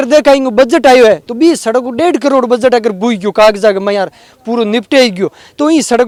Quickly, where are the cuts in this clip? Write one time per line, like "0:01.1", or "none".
none